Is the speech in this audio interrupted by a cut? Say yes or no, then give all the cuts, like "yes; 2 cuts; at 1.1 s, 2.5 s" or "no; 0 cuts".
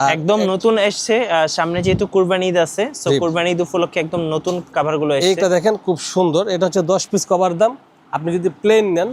no; 0 cuts